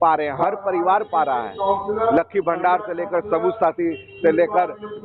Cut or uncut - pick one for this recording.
uncut